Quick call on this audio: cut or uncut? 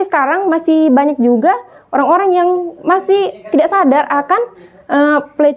uncut